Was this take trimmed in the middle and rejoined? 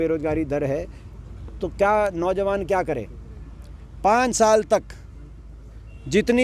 no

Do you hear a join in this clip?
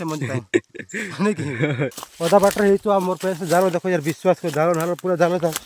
yes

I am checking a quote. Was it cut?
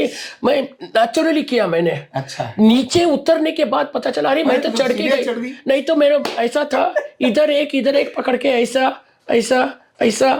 no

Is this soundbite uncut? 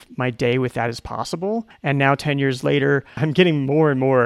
no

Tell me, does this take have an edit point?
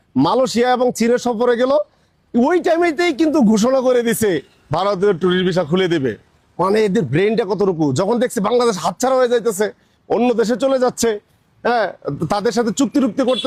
no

